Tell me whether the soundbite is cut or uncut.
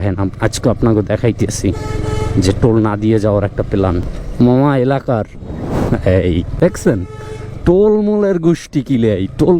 cut